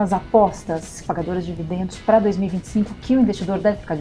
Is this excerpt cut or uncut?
cut